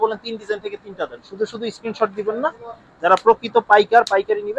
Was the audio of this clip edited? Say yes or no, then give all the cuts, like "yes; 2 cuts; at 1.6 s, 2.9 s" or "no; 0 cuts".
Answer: no; 0 cuts